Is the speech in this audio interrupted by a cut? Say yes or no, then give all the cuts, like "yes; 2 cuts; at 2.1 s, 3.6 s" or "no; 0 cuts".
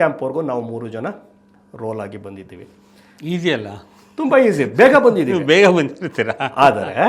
no; 0 cuts